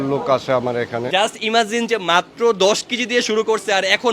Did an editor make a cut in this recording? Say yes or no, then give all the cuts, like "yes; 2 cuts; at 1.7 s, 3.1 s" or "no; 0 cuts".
yes; 1 cut; at 1.1 s